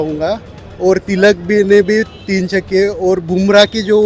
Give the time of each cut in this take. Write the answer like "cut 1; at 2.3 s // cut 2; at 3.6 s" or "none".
none